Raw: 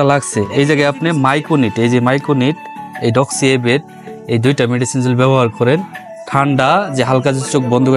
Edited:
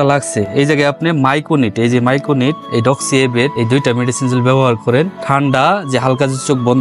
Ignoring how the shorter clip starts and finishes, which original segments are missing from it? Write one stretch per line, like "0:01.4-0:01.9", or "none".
0:02.6-0:02.9
0:03.8-0:04.3
0:05.9-0:06.2